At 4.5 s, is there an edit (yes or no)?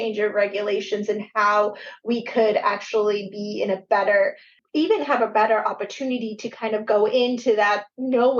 yes